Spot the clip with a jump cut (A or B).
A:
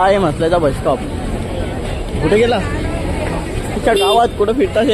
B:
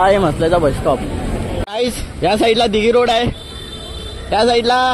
B